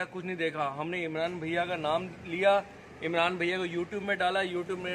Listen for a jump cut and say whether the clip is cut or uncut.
uncut